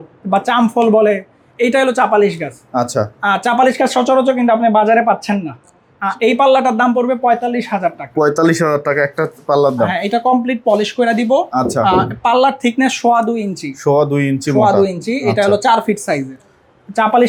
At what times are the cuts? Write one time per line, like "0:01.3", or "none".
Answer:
none